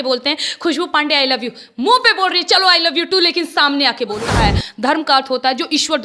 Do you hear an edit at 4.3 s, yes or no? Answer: yes